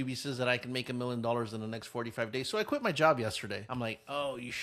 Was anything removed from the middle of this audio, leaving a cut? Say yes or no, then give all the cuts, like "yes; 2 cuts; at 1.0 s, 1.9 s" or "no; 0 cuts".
yes; 1 cut; at 3.6 s